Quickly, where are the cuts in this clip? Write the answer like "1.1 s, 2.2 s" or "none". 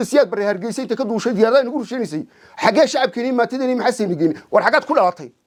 none